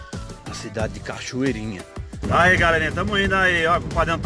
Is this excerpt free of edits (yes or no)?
no